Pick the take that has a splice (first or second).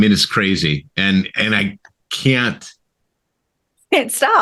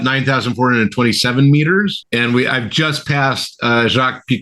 second